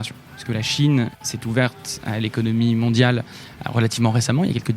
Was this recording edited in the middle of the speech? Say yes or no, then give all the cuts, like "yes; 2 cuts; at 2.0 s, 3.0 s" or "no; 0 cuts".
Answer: yes; 1 cut; at 1.2 s